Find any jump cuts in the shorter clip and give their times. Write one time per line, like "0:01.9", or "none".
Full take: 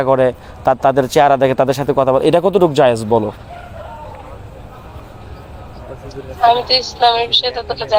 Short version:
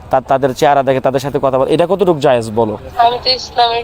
0:02.8